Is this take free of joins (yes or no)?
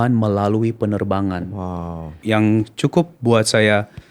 no